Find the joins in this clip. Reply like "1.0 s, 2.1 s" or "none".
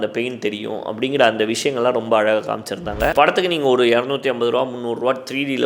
3.1 s